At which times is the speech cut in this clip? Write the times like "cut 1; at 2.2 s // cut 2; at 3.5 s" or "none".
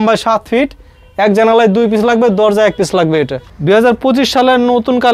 cut 1; at 3.4 s